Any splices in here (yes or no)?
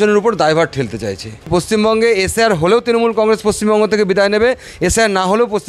yes